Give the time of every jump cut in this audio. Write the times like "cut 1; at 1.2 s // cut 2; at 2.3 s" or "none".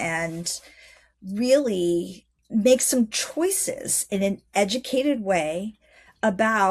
cut 1; at 2.3 s